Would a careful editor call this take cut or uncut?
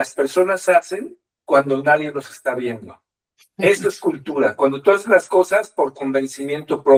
uncut